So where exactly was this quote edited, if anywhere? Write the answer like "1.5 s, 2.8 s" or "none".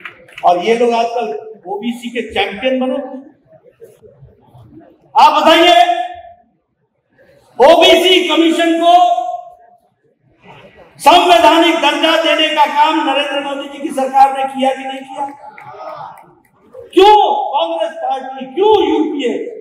none